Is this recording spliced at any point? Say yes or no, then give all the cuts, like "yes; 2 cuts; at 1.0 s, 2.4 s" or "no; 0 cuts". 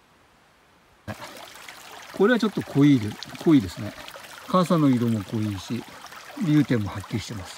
yes; 1 cut; at 1.1 s